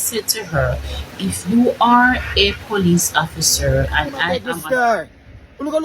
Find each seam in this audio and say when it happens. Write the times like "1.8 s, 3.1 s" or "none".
4.4 s